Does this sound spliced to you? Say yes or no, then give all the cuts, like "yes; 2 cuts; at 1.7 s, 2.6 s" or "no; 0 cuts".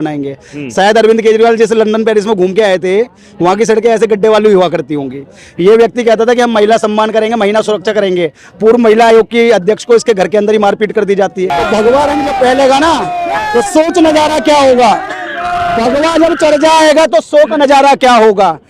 yes; 1 cut; at 11.5 s